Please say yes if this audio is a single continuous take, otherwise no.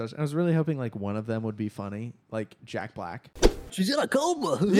no